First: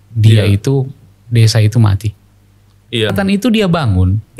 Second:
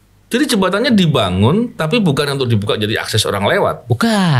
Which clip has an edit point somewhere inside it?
first; 1 cut; at 3.1 s

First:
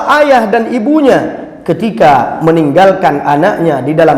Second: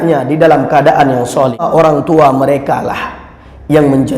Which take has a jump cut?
second; 1 cut; at 1.7 s

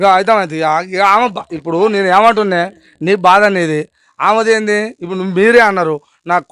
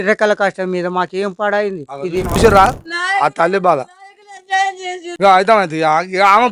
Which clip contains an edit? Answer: second; 1 cut; at 2.4 s

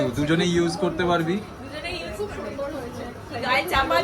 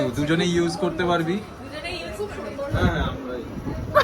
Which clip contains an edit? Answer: second; 1 cut; at 2.8 s

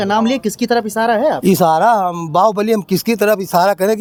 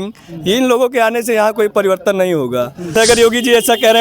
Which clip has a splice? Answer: second; 1 cut; at 2.9 s

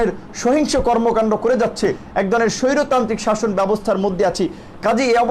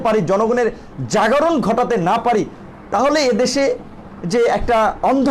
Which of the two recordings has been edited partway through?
first; 1 cut; at 2.0 s

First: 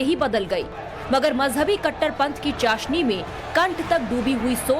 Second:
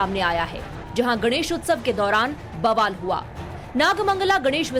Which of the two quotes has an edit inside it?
first; 1 cut; at 3.8 s

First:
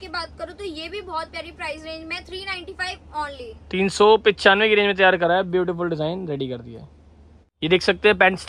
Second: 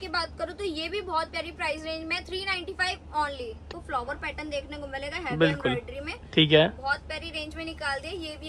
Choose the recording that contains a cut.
second; 1 cut; at 3.6 s

